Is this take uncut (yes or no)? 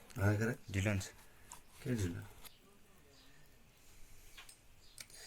no